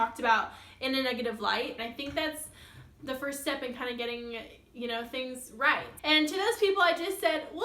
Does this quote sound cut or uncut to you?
cut